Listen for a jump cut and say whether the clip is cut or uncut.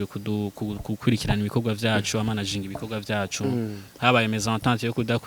uncut